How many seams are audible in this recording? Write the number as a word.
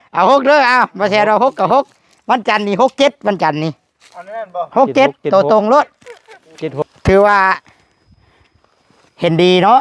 one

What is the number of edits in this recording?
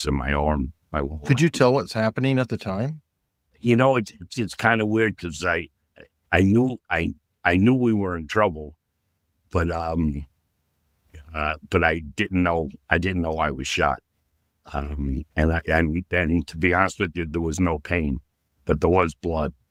zero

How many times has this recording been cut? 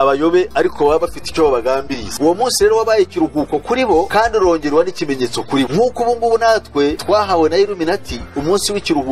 four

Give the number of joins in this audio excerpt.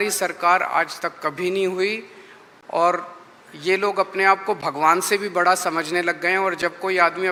zero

